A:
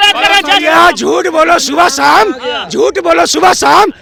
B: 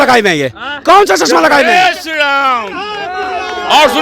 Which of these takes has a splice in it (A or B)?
B